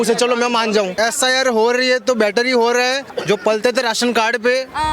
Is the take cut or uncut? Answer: cut